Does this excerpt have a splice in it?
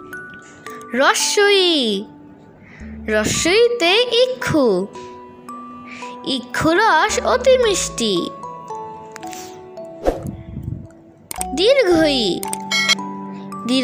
yes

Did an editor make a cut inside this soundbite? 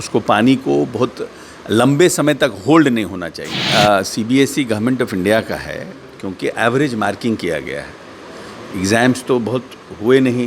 yes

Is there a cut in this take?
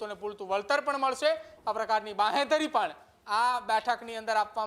no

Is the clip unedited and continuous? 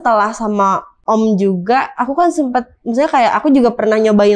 no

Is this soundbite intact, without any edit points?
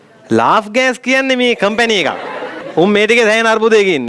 no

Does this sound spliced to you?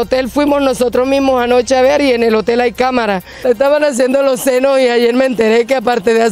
yes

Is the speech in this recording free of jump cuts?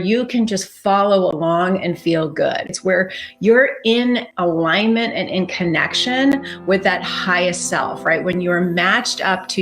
no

